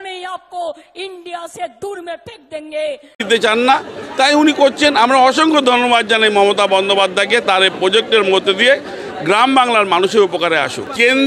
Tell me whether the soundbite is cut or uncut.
uncut